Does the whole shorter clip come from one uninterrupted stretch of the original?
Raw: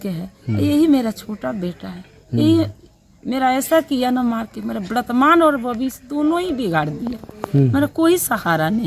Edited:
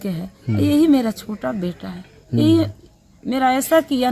yes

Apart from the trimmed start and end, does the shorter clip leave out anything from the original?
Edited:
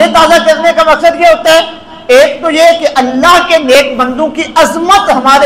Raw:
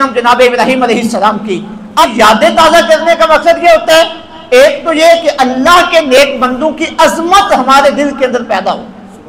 no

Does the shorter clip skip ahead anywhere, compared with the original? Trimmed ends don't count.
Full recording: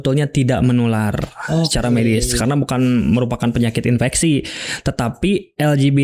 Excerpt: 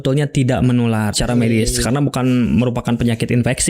yes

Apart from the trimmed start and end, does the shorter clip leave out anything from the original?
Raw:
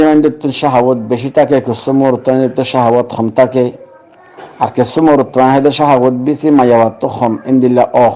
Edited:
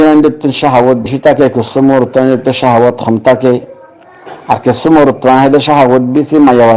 yes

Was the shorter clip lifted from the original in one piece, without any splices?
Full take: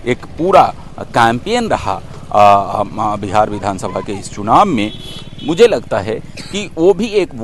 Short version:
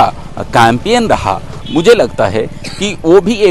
no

